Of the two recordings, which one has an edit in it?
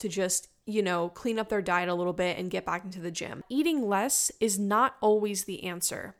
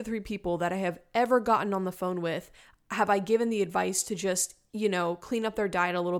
first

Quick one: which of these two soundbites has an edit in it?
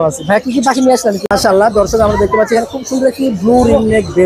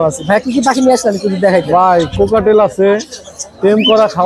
first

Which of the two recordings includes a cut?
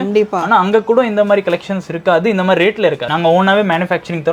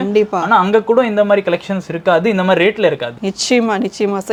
first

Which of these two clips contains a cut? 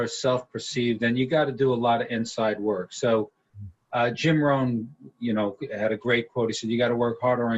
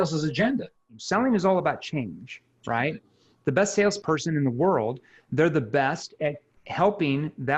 second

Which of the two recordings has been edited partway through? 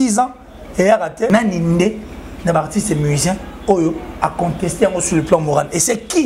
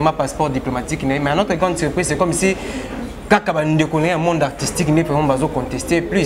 first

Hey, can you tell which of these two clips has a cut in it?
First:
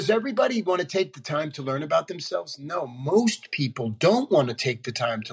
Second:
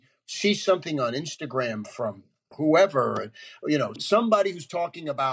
second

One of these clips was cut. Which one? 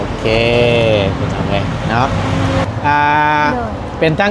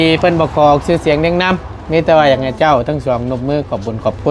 first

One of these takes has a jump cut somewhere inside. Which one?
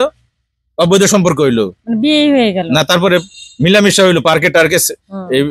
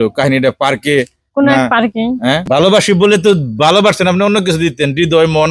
second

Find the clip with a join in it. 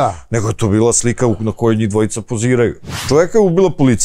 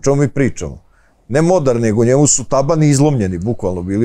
first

